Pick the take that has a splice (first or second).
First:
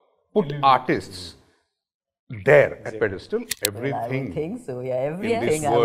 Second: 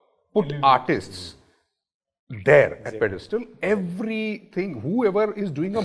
first